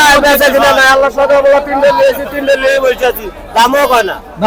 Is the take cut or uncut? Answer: uncut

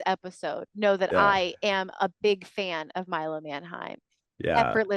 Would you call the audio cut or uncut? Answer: uncut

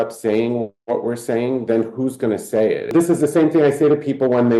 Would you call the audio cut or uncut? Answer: cut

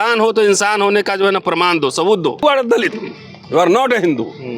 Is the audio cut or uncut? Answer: cut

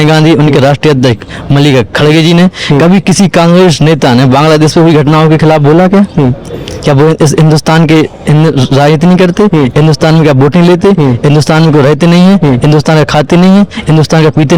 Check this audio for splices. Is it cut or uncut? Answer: uncut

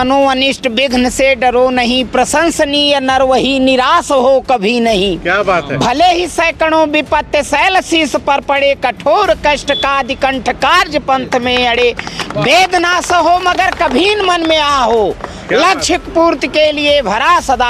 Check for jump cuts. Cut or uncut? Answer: uncut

